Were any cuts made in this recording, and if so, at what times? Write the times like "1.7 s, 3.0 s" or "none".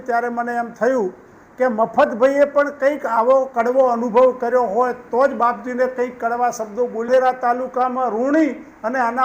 7.1 s